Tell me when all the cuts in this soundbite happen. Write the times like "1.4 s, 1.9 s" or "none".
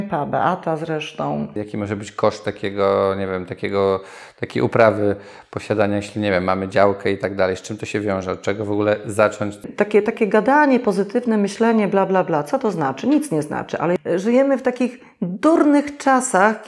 1.5 s, 9.7 s, 14.0 s